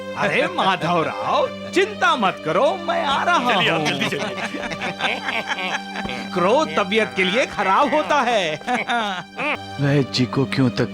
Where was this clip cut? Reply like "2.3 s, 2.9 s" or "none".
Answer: 9.7 s

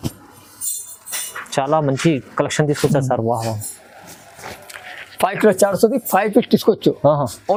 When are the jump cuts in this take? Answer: none

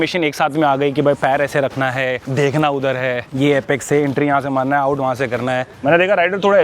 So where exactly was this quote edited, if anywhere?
2.2 s, 5.7 s

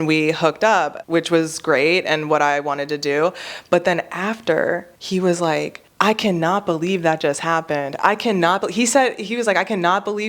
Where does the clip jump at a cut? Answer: 1.0 s, 4.9 s, 5.8 s

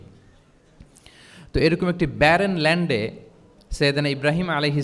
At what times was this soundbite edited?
none

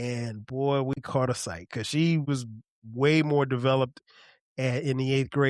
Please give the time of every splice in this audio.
2.3 s

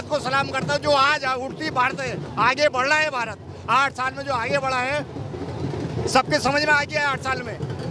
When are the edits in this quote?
none

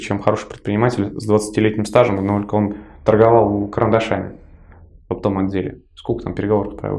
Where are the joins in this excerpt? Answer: none

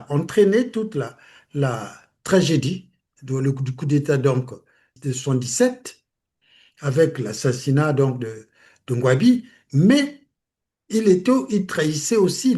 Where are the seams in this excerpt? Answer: 4.9 s

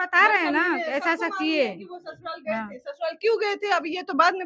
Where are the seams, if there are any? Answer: none

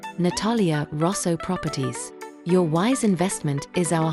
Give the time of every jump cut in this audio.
none

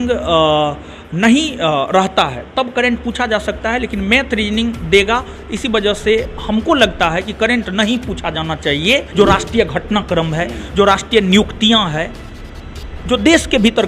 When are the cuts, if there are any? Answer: 9.1 s

